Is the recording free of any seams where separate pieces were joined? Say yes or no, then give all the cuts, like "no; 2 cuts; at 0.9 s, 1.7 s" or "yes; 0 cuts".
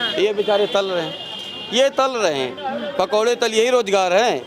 yes; 0 cuts